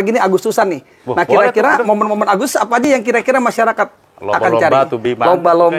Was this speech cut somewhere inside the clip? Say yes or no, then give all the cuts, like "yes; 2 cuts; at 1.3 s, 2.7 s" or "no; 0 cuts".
no; 0 cuts